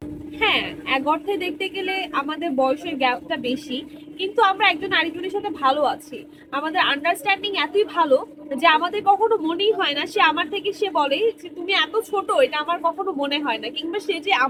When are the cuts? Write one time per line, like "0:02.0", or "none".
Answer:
none